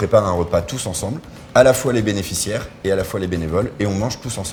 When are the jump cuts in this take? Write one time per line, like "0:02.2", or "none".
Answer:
none

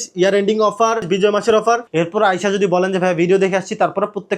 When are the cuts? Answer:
0:01.0
0:01.9

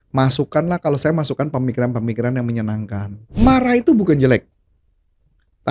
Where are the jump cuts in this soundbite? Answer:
0:03.2

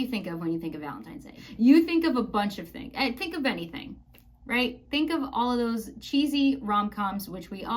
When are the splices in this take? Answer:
0:01.4

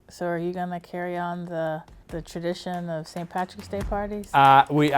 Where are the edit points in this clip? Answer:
0:02.0

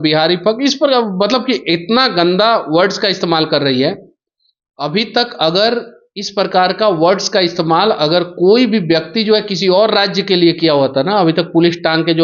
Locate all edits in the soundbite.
none

